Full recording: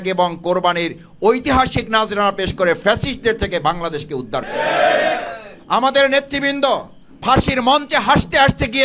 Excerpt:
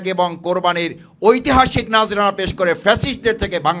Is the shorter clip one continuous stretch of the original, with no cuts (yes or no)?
yes